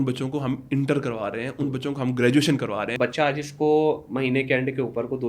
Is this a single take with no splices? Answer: no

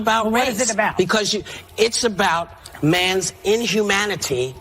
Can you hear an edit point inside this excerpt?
no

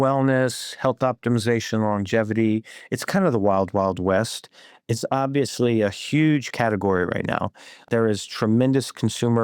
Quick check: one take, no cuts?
no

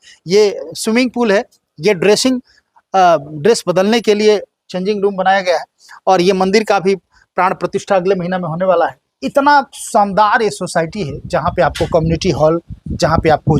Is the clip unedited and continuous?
yes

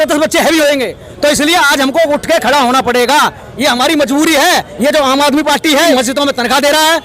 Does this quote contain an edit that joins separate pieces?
yes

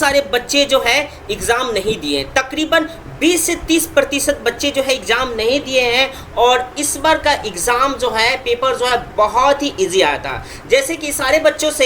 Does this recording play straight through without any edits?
yes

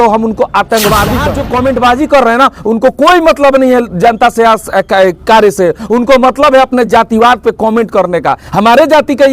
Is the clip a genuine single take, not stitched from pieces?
no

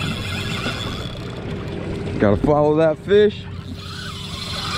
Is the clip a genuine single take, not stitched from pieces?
yes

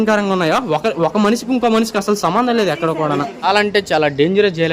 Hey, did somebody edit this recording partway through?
yes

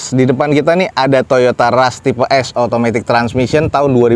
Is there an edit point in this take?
no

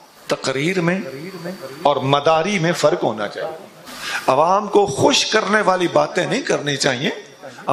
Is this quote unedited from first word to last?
yes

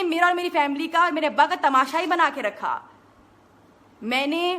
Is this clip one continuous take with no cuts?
yes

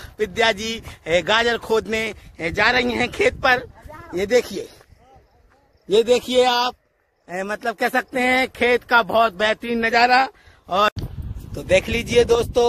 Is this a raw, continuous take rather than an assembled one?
no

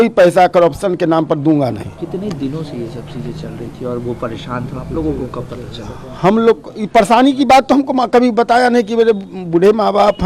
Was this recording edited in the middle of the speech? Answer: no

